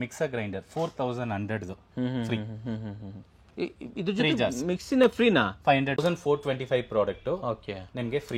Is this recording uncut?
no; 1 cut; at 6.0 s

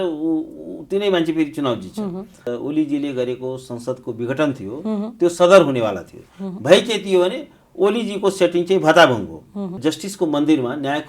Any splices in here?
yes; 2 cuts; at 2.4 s, 9.8 s

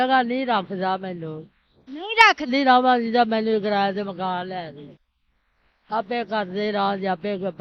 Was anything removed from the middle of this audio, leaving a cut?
yes; 1 cut; at 2.5 s

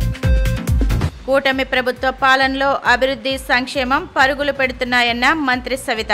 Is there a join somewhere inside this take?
yes; 1 cut; at 1.1 s

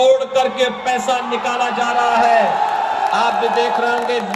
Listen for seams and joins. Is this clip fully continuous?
yes; 0 cuts

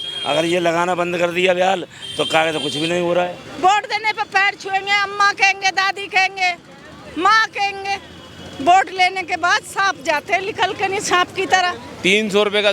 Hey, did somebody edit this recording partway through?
yes; 2 cuts; at 3.4 s, 11.8 s

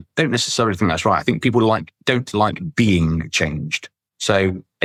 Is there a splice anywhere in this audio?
no; 0 cuts

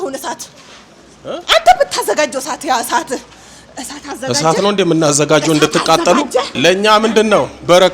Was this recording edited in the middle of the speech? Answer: yes; 1 cut; at 6.6 s

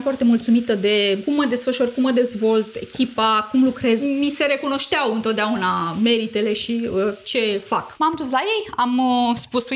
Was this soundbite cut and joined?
yes; 3 cuts; at 1.2 s, 4.0 s, 7.9 s

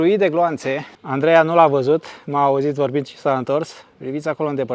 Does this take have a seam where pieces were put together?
no; 0 cuts

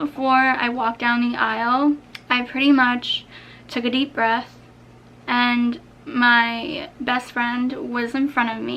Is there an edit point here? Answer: yes; 1 cut; at 2.1 s

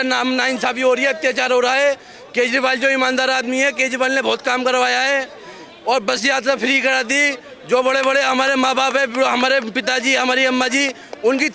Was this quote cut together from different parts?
no; 0 cuts

